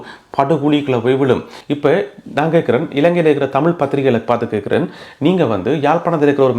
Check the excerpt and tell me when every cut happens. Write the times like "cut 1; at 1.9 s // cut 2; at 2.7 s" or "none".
cut 1; at 1.6 s